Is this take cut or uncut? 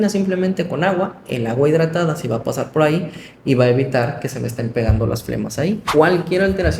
cut